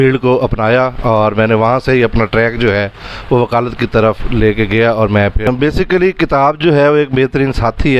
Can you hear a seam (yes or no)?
yes